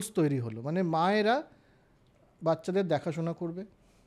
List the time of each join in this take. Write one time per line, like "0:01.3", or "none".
none

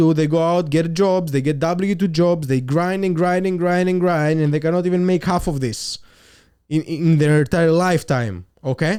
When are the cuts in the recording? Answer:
none

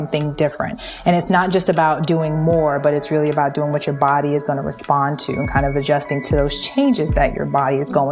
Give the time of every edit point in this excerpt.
none

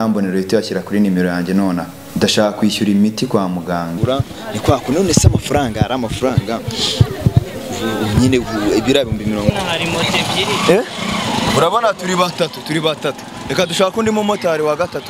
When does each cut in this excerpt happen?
0:02.0
0:03.9
0:09.5

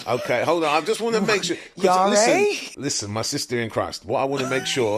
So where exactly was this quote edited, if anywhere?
0:02.7

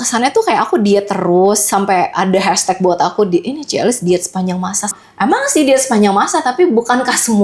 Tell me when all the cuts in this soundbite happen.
0:05.0

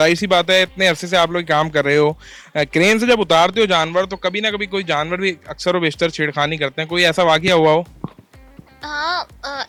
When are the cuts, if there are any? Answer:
none

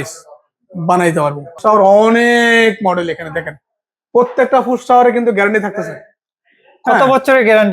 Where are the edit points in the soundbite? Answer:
0:01.6

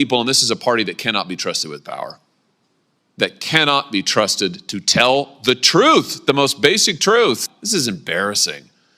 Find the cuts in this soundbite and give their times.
0:07.5

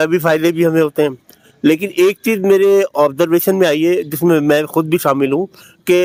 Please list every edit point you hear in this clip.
none

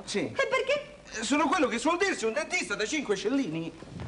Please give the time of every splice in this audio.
0:01.2

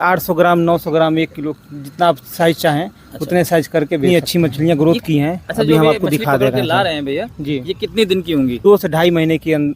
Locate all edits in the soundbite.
0:04.0
0:08.6

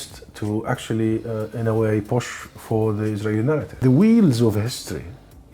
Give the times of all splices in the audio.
0:03.7

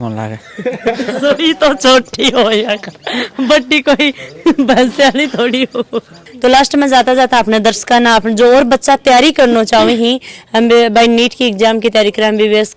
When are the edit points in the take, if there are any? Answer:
none

